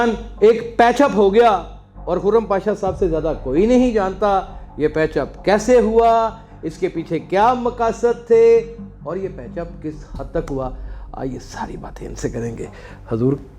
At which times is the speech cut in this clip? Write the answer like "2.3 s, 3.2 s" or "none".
none